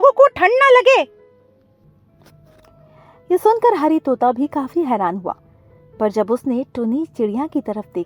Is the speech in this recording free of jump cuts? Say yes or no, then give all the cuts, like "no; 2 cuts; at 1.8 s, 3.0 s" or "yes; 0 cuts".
yes; 0 cuts